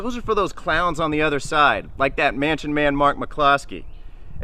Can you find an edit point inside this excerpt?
no; 0 cuts

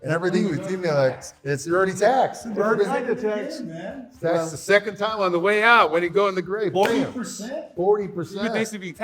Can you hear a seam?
no; 0 cuts

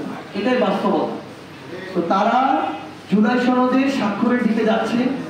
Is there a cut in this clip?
no; 0 cuts

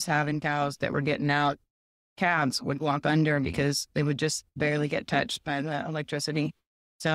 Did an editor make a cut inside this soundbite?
yes; 1 cut; at 4.5 s

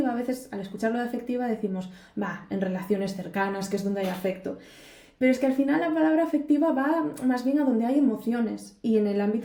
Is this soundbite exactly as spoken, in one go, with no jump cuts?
yes; 0 cuts

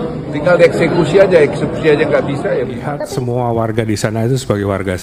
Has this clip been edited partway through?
yes; 1 cut; at 2.8 s

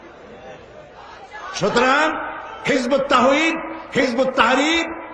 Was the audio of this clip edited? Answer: yes; 1 cut; at 1.4 s

